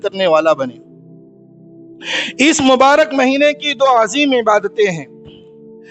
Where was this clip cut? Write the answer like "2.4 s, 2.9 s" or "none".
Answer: none